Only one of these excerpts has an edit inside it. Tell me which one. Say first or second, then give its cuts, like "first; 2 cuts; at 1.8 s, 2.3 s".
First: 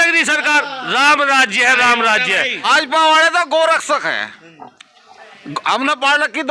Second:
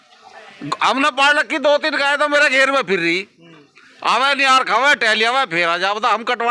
first; 1 cut; at 2.6 s